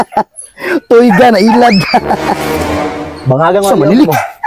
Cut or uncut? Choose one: uncut